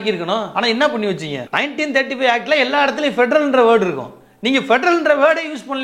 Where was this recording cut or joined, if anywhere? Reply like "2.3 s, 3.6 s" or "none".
1.4 s